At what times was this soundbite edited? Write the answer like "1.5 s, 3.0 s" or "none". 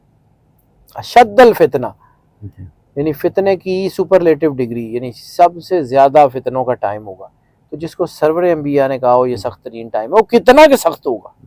none

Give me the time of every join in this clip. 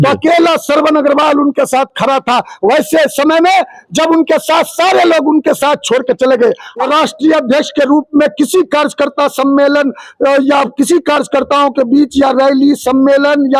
6.8 s

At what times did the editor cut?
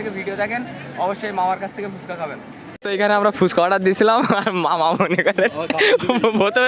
2.8 s

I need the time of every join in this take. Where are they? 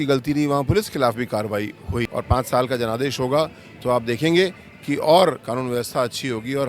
2.1 s

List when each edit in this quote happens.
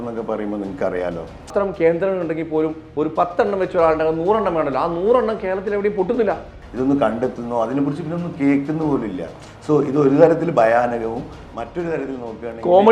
1.5 s, 6.6 s

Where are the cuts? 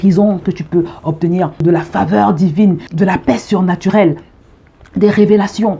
1.6 s, 2.9 s

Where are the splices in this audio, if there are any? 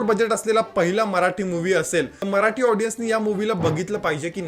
2.2 s

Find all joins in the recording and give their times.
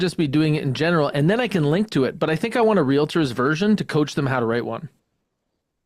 none

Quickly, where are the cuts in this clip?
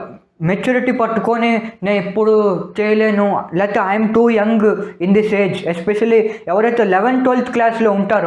none

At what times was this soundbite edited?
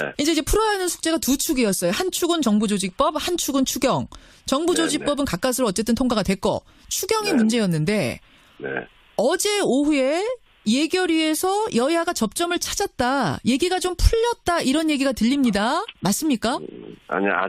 12.7 s

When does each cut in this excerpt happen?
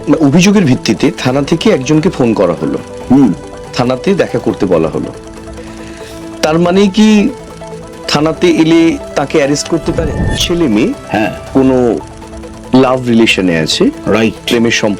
10.0 s

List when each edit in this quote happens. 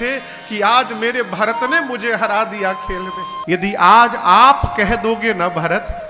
3.4 s

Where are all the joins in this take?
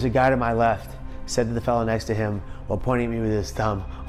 none

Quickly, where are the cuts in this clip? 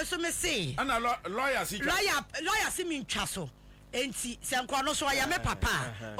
none

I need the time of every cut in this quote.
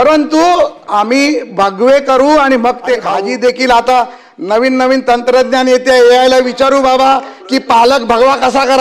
3.1 s

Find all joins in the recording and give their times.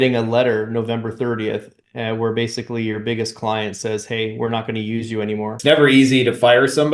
5.6 s

